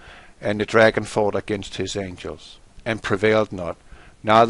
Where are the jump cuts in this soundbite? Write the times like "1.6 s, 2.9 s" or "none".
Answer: none